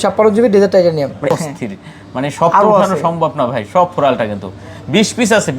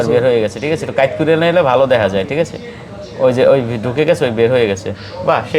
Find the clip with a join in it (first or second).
first